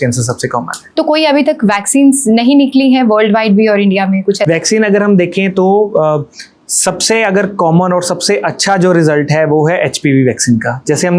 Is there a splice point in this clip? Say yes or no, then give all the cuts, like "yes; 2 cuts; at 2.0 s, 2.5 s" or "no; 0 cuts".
no; 0 cuts